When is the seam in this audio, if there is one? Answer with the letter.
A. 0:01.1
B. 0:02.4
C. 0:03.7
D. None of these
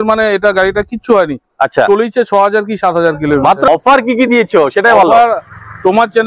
C